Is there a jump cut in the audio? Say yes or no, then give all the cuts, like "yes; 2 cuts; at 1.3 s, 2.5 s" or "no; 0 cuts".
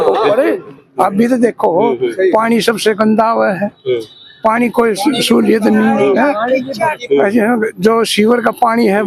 no; 0 cuts